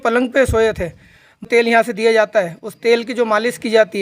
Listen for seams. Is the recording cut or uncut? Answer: cut